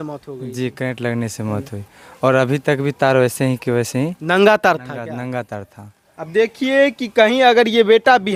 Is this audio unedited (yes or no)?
yes